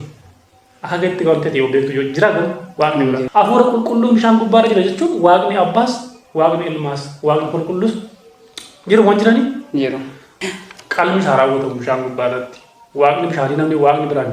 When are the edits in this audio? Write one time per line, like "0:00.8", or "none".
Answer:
0:03.2
0:10.3